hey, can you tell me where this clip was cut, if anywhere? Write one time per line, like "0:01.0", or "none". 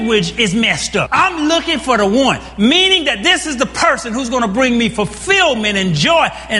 0:01.1